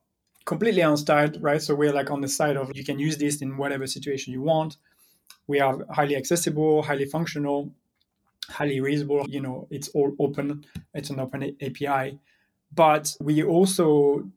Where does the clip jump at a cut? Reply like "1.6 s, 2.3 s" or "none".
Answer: 2.7 s, 9.3 s, 13.2 s